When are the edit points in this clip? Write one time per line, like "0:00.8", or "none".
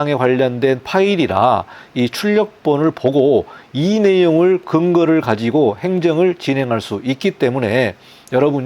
none